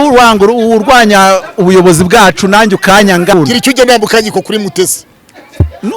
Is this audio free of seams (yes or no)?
no